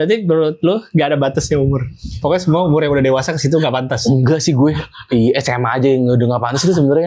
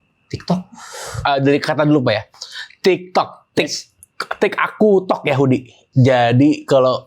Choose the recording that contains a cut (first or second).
second